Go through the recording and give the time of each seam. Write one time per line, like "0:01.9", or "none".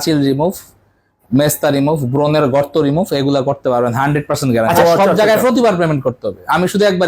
0:04.8